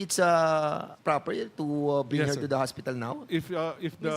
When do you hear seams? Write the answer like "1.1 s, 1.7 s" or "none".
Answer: 0.9 s, 3.2 s